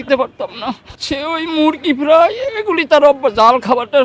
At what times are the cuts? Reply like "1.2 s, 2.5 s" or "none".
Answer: 0.9 s

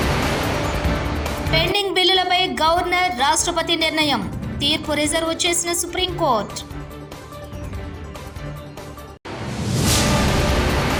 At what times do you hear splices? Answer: none

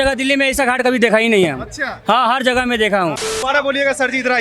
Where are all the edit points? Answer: 3.3 s

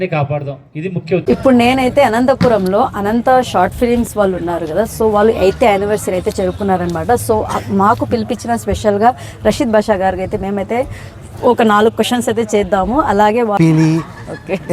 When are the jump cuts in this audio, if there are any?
1.3 s, 13.6 s

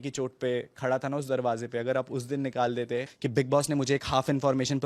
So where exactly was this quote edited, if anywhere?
3.2 s

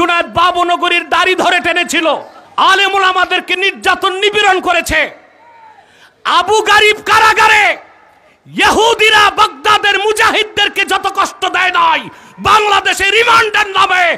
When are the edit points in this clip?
2.4 s

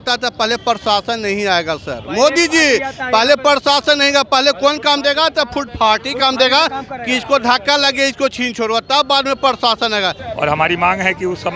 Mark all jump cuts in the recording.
10.2 s

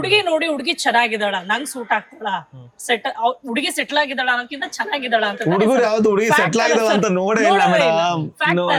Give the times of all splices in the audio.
none

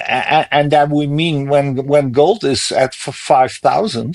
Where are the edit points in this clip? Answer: none

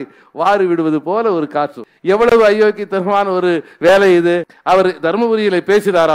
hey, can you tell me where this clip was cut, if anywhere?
1.9 s, 4.5 s

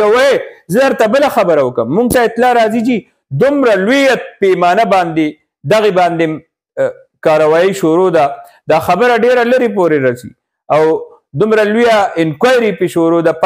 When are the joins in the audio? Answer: none

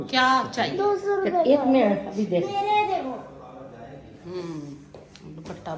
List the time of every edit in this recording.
none

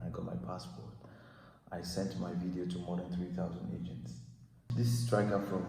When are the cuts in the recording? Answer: 4.7 s

